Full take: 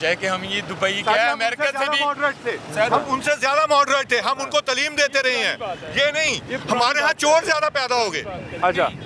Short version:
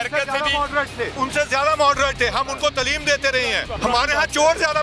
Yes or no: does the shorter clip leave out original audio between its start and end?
yes